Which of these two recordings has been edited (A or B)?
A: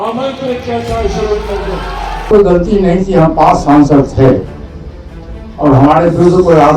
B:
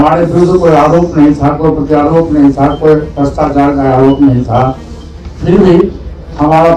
A